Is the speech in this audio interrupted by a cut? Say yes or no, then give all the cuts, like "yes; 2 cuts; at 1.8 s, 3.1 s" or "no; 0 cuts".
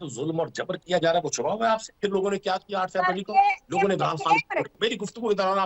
yes; 3 cuts; at 0.8 s, 1.9 s, 4.7 s